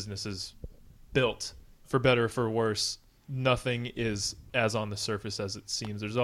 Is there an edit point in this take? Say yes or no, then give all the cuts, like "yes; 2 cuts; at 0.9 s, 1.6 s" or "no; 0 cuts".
yes; 2 cuts; at 1.8 s, 4.4 s